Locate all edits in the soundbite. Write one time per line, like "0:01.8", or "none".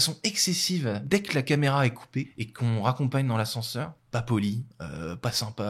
0:01.0
0:02.4
0:04.0